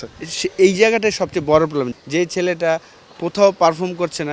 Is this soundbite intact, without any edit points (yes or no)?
no